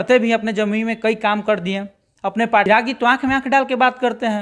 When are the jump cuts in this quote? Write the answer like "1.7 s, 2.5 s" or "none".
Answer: 2.7 s